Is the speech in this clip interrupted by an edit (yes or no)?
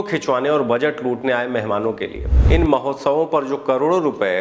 yes